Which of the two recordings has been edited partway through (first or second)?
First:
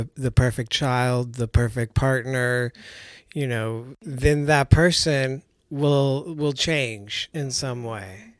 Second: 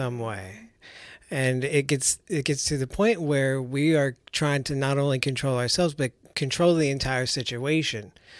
first